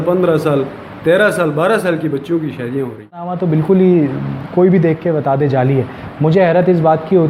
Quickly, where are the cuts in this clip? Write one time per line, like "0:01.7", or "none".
0:03.3